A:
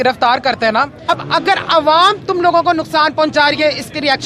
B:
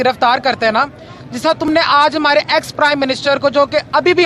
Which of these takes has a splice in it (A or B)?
A